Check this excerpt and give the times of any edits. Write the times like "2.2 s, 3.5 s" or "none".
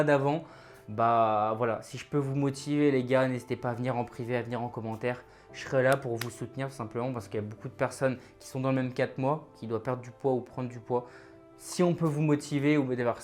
none